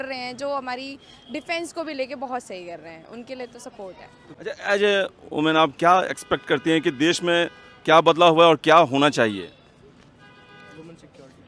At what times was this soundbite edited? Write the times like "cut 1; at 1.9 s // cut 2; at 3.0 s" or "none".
cut 1; at 4.3 s